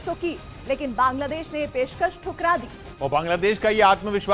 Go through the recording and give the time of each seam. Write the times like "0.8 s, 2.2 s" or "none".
2.8 s